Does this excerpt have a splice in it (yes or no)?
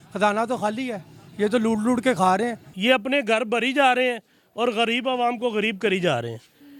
yes